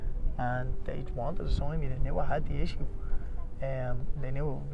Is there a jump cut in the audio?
no; 0 cuts

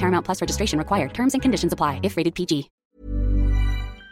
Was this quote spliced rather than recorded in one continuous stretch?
yes; 1 cut; at 3.0 s

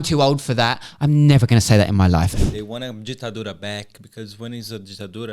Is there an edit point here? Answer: yes; 1 cut; at 2.3 s

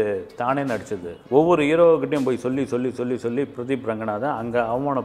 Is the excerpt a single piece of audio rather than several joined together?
no; 1 cut; at 1.2 s

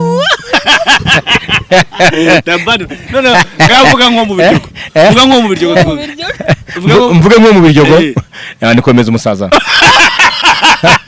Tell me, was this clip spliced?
no; 0 cuts

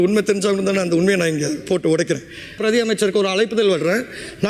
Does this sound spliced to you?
yes; 1 cut; at 2.6 s

